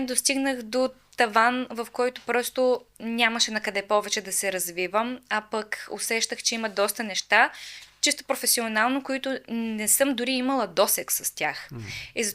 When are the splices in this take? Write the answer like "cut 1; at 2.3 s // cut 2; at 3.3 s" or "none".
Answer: none